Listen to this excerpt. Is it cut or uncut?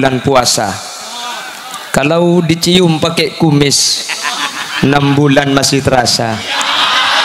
uncut